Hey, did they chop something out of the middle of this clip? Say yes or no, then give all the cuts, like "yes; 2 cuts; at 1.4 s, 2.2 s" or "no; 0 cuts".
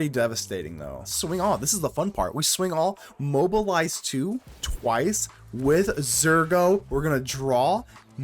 yes; 1 cut; at 1.1 s